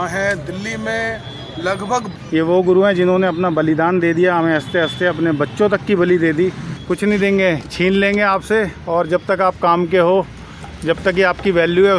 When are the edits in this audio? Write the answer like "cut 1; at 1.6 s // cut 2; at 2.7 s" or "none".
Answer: cut 1; at 2.1 s // cut 2; at 6.7 s